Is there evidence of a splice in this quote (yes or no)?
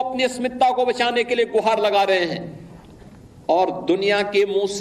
no